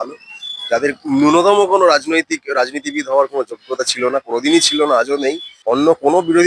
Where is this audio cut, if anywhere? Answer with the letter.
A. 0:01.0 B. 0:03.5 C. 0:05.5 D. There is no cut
C